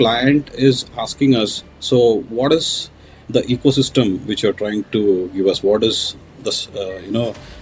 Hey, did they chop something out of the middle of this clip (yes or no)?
no